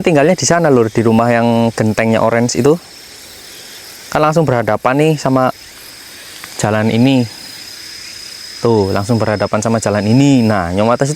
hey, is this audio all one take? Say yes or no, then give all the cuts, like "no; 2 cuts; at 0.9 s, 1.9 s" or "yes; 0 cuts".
yes; 0 cuts